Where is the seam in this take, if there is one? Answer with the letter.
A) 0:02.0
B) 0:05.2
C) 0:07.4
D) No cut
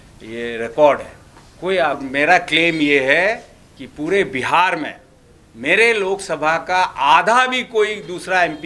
A